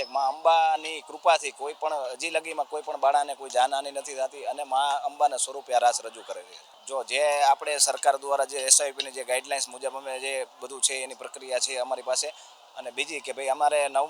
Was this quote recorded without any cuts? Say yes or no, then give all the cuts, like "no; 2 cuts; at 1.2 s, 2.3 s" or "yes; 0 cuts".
yes; 0 cuts